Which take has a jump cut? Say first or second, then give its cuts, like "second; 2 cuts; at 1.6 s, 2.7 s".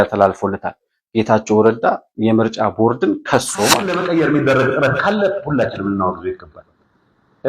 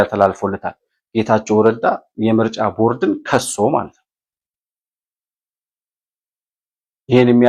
first; 1 cut; at 3.9 s